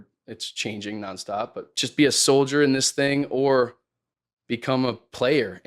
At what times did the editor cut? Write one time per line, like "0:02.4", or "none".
0:01.6